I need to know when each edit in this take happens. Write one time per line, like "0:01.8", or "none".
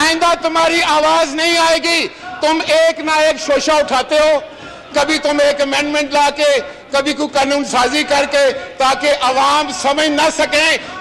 none